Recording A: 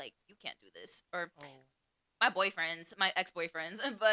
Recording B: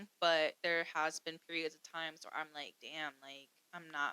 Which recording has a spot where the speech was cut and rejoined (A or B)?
B